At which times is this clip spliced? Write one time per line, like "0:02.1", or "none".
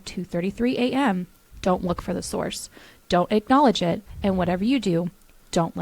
none